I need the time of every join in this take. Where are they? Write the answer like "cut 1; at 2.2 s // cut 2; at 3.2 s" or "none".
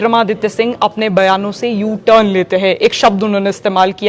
none